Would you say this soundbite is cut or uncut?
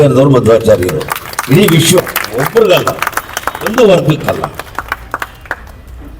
cut